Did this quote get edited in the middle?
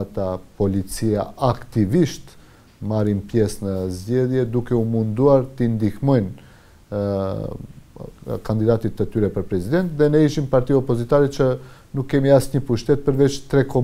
no; 0 cuts

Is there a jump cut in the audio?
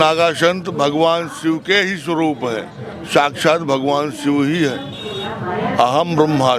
no; 0 cuts

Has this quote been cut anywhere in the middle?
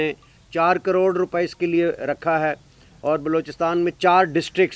no; 0 cuts

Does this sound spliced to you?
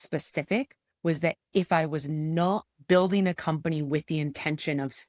no; 0 cuts

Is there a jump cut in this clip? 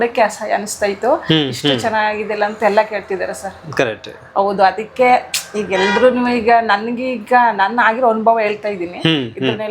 no; 0 cuts

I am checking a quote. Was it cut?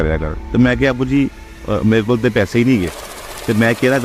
no; 0 cuts

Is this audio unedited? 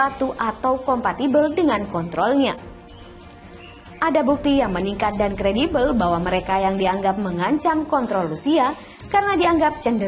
yes; 0 cuts

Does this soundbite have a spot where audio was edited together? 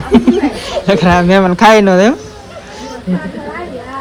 no; 0 cuts

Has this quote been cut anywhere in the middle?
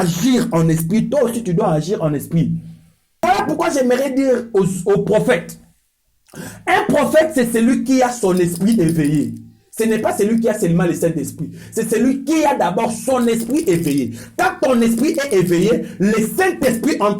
yes; 1 cut; at 3.2 s

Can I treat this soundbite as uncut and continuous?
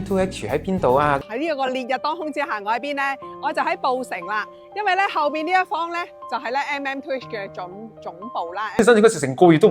no; 2 cuts; at 1.2 s, 8.8 s

